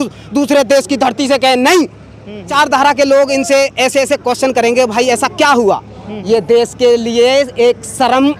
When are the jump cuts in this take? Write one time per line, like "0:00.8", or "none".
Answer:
0:02.5